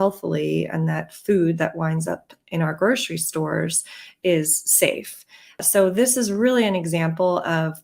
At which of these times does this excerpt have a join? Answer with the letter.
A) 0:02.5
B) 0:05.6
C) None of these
B